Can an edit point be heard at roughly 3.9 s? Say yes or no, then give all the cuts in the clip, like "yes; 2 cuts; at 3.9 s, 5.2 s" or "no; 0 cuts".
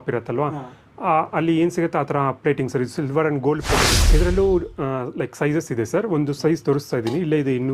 yes; 1 cut; at 3.9 s